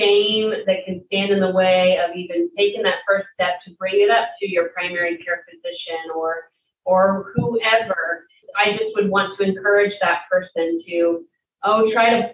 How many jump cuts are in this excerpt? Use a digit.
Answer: 1